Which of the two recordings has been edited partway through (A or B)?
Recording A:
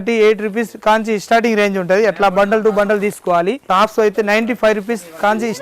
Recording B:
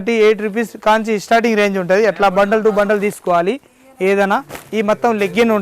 A